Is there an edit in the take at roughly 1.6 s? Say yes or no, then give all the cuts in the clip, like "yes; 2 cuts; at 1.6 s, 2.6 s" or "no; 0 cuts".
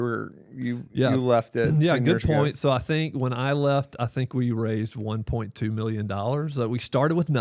no; 0 cuts